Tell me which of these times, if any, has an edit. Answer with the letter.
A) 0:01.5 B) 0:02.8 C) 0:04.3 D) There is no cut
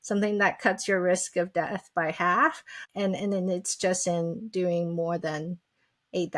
B